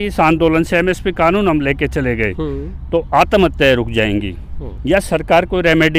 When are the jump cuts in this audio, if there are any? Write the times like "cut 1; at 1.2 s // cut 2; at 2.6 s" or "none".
none